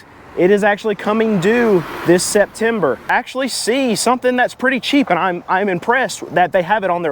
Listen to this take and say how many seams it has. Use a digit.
1